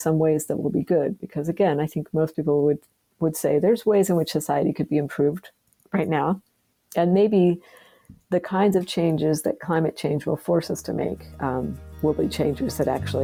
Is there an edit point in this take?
no; 0 cuts

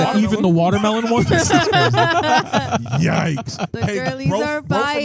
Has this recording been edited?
no; 0 cuts

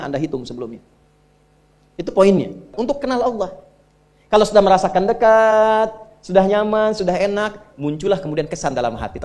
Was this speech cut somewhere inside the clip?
yes; 1 cut; at 2.7 s

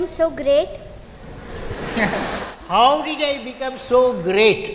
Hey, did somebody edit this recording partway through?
no; 0 cuts

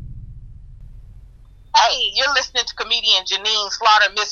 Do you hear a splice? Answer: yes; 1 cut; at 1.5 s

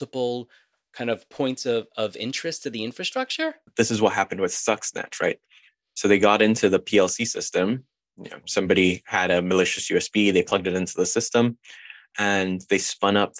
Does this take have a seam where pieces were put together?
yes; 1 cut; at 3.7 s

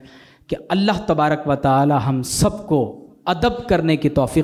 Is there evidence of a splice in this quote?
no; 0 cuts

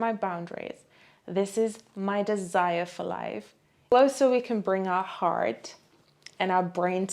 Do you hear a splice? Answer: yes; 1 cut; at 3.9 s

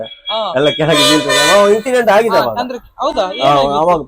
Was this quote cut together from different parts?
no; 0 cuts

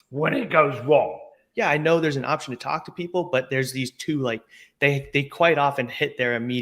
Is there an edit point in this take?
yes; 1 cut; at 1.4 s

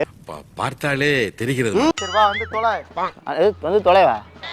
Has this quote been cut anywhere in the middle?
yes; 1 cut; at 1.9 s

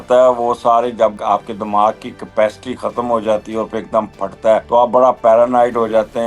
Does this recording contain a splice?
yes; 2 cuts; at 1.2 s, 4.6 s

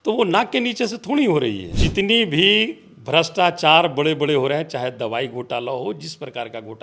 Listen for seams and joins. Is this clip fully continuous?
no; 1 cut; at 1.7 s

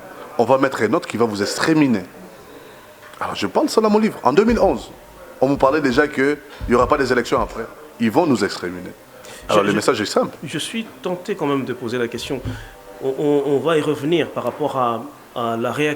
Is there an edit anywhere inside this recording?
no; 0 cuts

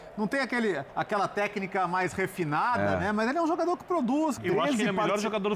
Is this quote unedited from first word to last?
no; 1 cut; at 4.4 s

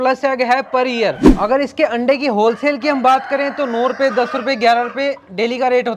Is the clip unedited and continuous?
no; 1 cut; at 1.3 s

